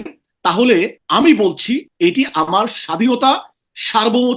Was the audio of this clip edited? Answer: yes; 2 cuts; at 1.0 s, 1.9 s

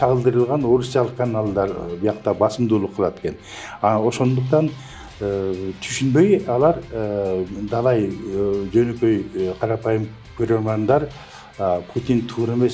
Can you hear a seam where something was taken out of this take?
no; 0 cuts

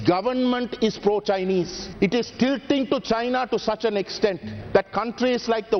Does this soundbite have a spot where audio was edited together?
no; 0 cuts

